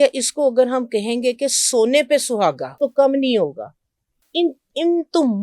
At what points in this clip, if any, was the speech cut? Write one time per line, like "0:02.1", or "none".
0:02.7